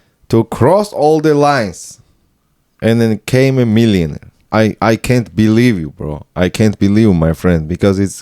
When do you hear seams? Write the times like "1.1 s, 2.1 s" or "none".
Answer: 4.4 s

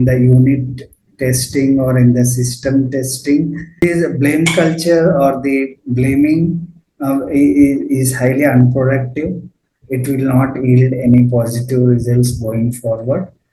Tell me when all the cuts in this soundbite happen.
3.7 s

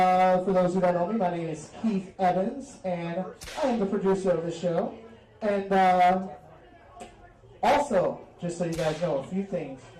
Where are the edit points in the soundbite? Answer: none

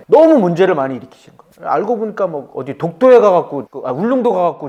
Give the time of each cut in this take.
none

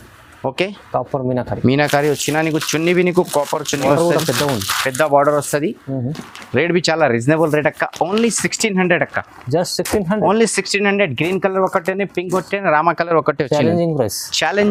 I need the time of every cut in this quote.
none

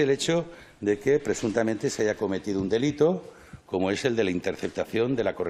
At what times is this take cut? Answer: none

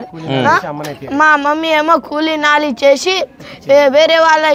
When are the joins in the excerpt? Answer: none

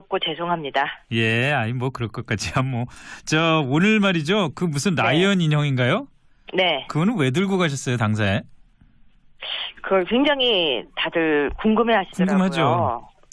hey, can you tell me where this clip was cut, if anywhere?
3.0 s

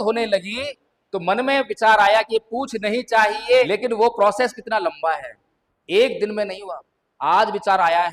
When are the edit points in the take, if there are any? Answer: 3.7 s

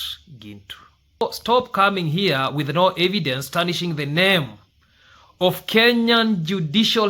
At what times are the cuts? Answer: 1.2 s

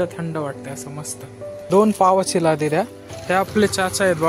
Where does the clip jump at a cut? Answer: 1.6 s

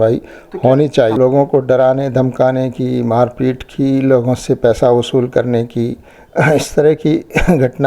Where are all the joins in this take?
1.2 s

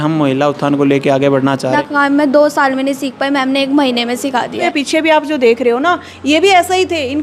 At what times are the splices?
1.8 s, 4.6 s

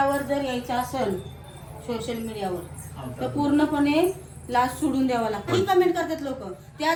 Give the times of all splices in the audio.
none

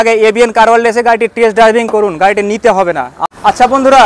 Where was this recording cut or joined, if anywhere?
3.1 s

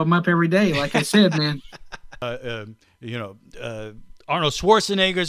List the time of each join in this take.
2.2 s

